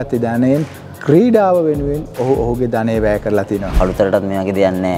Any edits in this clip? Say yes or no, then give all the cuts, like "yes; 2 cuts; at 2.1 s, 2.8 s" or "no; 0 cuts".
yes; 1 cut; at 3.7 s